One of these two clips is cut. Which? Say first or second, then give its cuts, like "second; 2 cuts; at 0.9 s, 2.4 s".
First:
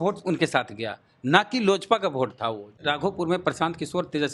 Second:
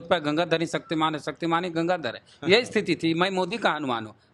first; 1 cut; at 2.8 s